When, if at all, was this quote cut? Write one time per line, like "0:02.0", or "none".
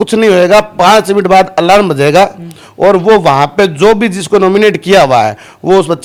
none